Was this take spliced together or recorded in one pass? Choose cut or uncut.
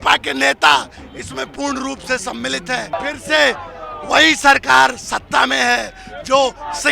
cut